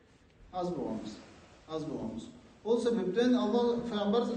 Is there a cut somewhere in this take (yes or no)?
no